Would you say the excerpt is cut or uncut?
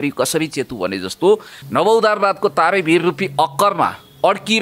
cut